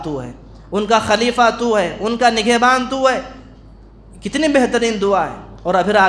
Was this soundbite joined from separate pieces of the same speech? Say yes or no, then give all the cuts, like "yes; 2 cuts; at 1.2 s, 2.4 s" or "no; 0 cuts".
no; 0 cuts